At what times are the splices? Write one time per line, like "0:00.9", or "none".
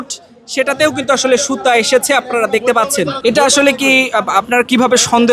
0:03.1